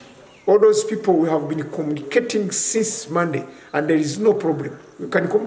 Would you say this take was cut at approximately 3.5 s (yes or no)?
no